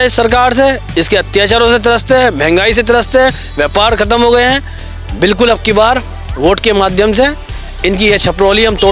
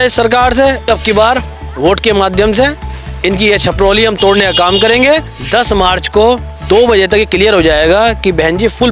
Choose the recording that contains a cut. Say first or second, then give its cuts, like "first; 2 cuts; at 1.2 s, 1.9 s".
second; 3 cuts; at 0.9 s, 5.4 s, 6.5 s